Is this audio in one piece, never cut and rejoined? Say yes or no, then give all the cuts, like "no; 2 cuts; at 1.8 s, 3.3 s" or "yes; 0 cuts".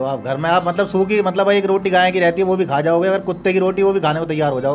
yes; 0 cuts